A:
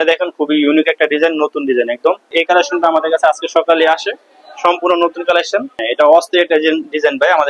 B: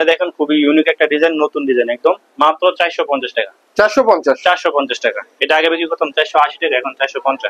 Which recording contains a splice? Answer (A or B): A